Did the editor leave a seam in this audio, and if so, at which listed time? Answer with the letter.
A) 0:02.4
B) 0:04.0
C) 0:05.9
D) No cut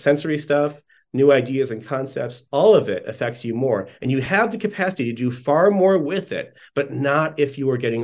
D